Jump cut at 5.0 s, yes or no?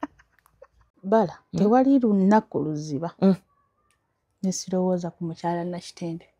no